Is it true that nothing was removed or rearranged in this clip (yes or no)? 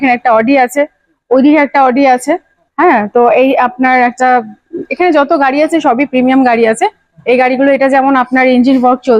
yes